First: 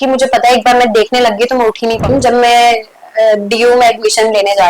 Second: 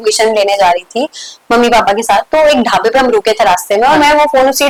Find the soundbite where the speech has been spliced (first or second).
first